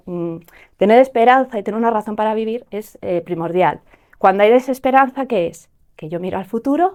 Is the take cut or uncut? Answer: uncut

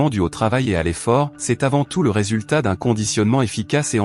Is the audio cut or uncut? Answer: cut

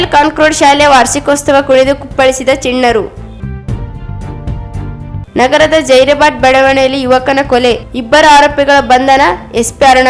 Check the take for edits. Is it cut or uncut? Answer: cut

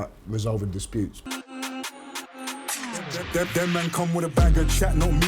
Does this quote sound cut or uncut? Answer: cut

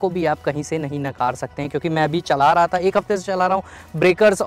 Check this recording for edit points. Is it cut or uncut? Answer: uncut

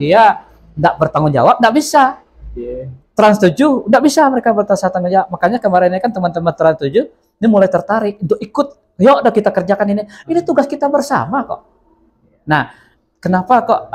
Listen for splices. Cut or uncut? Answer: uncut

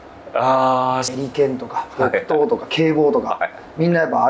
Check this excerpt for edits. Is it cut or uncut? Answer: cut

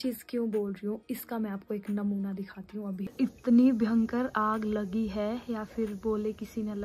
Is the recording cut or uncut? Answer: cut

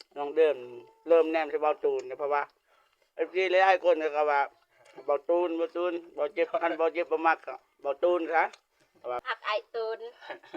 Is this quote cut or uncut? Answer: cut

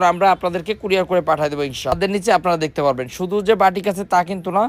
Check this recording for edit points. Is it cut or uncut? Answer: cut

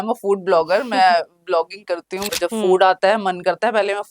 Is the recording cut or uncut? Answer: cut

